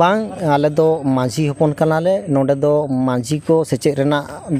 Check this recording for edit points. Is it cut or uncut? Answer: uncut